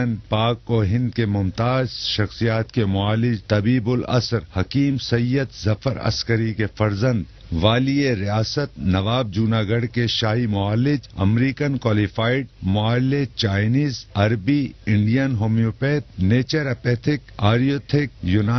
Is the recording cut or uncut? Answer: uncut